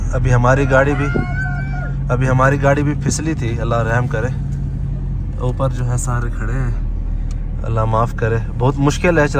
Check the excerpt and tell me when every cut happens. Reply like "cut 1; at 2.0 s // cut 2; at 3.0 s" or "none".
none